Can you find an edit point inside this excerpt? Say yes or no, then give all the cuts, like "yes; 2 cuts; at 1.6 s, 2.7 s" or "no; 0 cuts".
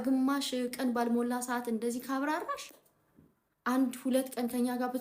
no; 0 cuts